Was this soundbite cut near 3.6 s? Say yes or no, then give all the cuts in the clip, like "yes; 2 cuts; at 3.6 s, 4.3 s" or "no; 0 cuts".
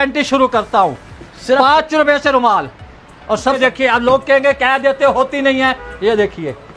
yes; 1 cut; at 3.6 s